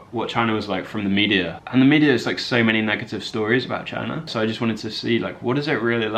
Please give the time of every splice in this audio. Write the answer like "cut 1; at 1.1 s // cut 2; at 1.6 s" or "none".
cut 1; at 4.3 s